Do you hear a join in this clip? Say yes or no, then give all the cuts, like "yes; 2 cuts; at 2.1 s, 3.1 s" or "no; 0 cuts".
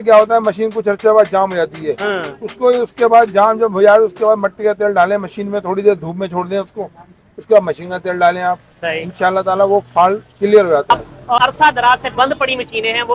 yes; 1 cut; at 10.9 s